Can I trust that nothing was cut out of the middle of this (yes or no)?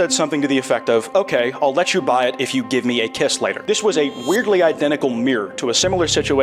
yes